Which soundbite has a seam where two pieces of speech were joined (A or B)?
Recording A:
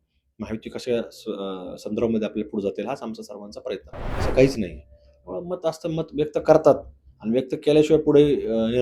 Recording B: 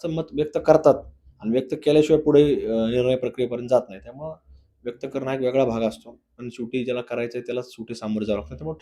A